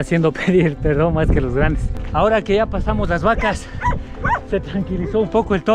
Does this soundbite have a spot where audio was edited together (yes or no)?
yes